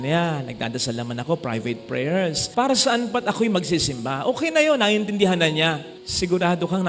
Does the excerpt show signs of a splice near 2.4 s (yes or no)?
yes